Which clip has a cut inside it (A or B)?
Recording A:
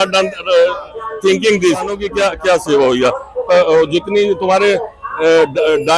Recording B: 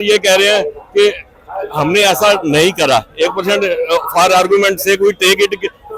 A